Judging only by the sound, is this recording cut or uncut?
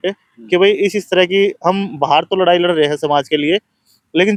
uncut